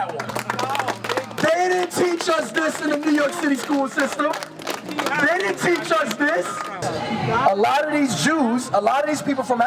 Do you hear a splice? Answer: yes; 1 cut; at 6.8 s

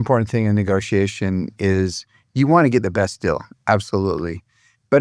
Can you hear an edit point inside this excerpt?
no; 0 cuts

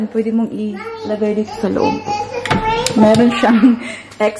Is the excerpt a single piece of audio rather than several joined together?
yes; 0 cuts

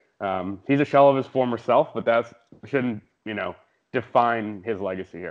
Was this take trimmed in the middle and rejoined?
no; 0 cuts

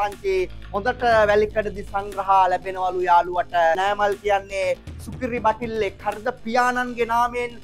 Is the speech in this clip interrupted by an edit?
yes; 1 cut; at 3.8 s

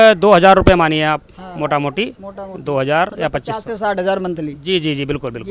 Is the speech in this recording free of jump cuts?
yes; 0 cuts

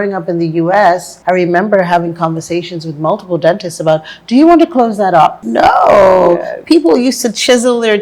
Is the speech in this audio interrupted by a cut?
yes; 2 cuts; at 1.1 s, 5.4 s

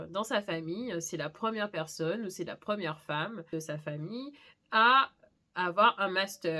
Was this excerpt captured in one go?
yes; 0 cuts

